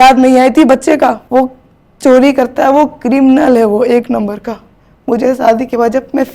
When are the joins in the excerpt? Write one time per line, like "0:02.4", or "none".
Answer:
0:01.2